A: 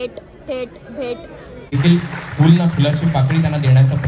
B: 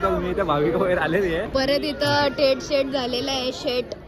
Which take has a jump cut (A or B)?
A